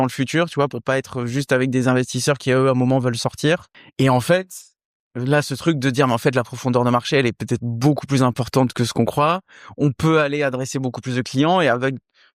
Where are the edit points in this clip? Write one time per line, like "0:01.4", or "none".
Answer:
0:03.8